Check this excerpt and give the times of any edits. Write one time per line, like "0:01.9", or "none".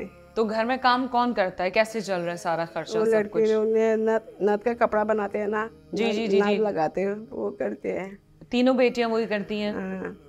none